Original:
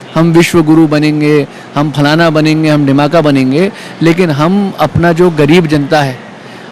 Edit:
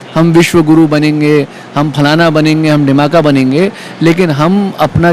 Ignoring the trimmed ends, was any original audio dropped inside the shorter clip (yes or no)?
no